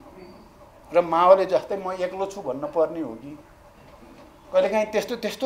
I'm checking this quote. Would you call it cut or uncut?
uncut